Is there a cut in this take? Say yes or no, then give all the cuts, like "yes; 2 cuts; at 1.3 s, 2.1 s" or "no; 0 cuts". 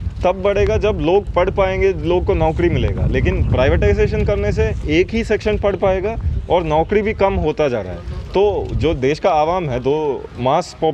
no; 0 cuts